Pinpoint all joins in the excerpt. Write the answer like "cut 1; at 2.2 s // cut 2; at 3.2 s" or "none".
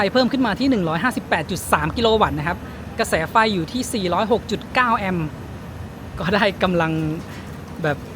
none

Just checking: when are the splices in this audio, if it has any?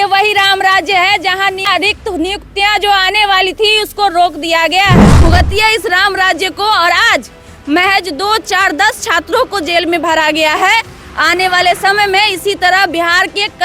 cut 1; at 5.2 s

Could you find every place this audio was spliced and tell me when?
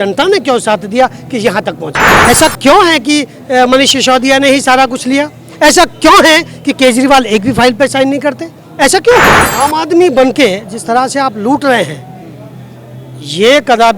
cut 1; at 2.0 s // cut 2; at 9.5 s

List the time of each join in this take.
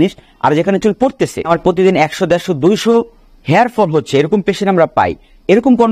cut 1; at 1.5 s

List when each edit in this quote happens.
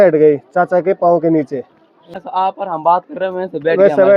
cut 1; at 2.0 s

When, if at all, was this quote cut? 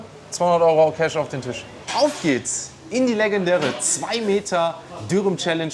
cut 1; at 1.7 s

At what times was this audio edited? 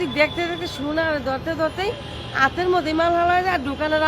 none

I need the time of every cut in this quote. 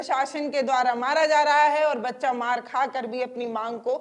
none

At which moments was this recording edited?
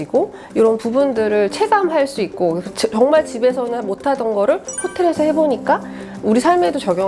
none

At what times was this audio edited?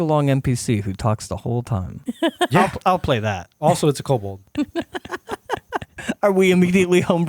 cut 1; at 1.9 s // cut 2; at 3.5 s // cut 3; at 4.4 s // cut 4; at 5.9 s

